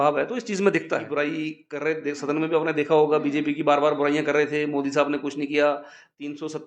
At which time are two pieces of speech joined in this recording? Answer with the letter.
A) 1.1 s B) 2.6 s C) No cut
A